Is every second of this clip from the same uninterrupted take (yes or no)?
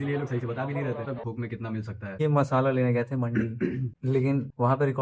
no